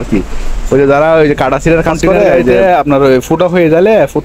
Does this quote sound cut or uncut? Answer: cut